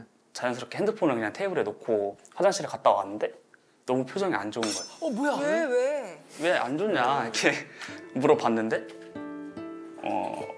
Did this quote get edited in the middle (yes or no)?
no